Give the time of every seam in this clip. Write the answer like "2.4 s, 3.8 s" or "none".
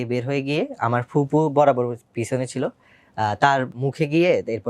3.7 s